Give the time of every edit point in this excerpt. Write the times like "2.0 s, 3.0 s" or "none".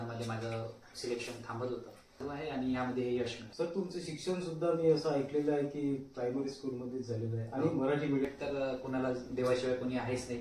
2.2 s, 8.2 s